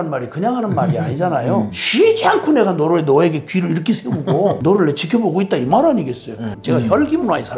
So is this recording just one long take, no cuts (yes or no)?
no